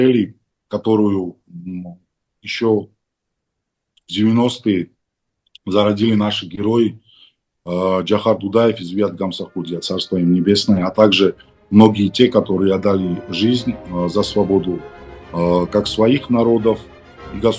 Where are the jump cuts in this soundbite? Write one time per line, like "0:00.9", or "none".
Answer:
none